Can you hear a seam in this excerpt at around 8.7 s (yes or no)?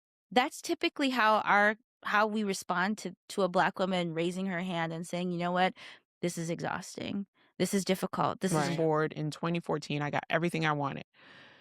yes